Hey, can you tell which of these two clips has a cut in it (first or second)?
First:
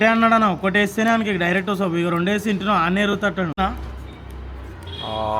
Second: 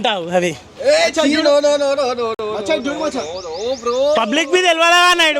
first